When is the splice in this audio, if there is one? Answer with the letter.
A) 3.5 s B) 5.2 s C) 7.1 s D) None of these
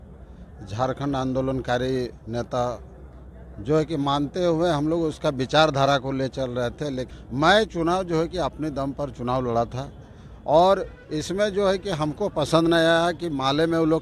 C